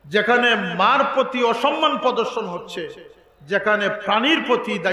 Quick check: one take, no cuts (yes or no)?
yes